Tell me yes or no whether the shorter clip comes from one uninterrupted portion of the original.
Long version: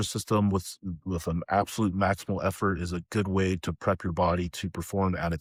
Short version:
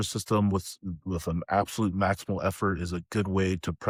yes